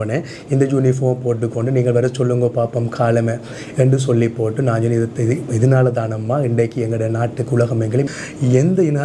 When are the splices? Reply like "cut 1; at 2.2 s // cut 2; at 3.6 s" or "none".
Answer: cut 1; at 8.1 s